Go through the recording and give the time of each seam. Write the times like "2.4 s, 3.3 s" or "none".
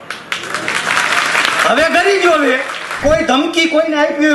3.0 s